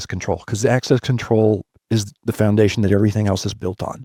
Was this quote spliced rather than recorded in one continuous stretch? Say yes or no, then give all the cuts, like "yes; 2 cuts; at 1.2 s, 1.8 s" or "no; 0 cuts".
no; 0 cuts